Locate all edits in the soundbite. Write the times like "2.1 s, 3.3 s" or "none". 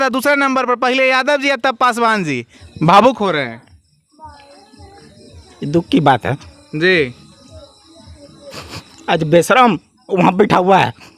2.5 s

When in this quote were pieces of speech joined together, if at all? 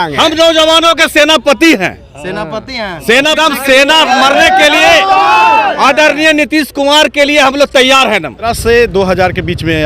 3.4 s, 8.5 s

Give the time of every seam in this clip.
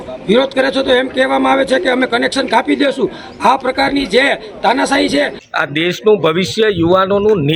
5.4 s

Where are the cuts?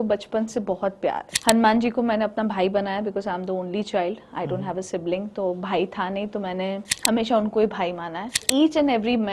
1.3 s, 6.9 s, 8.4 s

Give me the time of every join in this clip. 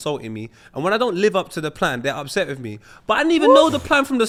none

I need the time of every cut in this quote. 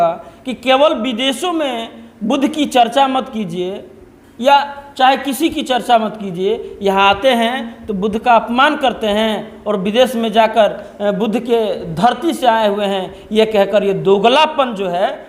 none

